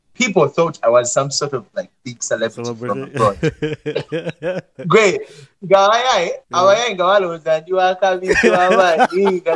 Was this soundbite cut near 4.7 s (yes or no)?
yes